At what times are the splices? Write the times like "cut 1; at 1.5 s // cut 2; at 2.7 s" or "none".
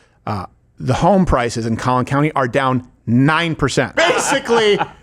cut 1; at 3.9 s